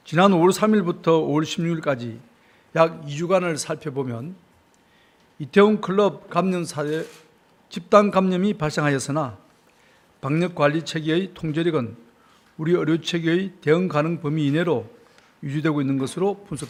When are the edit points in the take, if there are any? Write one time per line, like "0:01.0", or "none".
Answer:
none